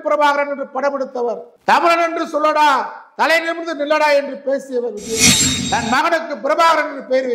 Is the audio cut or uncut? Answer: uncut